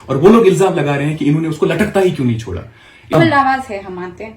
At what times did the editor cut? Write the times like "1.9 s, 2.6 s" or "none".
3.1 s